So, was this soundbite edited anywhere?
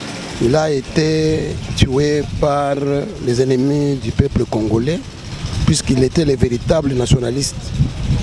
no; 0 cuts

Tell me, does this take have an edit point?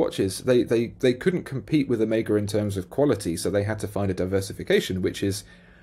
no; 0 cuts

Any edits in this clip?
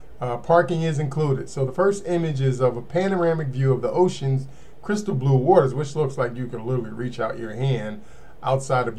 no; 0 cuts

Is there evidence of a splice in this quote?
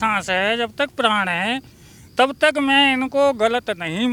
no; 0 cuts

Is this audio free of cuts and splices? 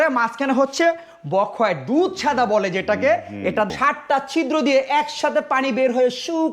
no; 1 cut; at 3.7 s

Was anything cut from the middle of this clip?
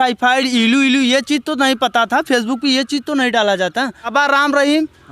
yes; 1 cut; at 4.1 s

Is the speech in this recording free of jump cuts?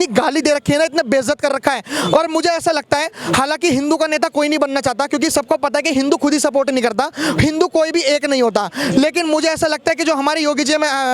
yes; 0 cuts

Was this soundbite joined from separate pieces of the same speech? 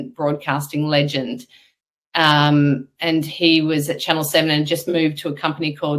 no; 0 cuts

